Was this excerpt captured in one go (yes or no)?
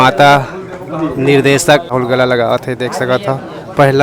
no